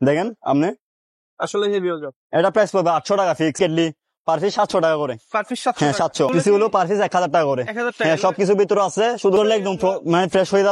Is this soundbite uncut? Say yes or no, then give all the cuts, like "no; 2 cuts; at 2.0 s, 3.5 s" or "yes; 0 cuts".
no; 3 cuts; at 3.6 s, 6.3 s, 9.4 s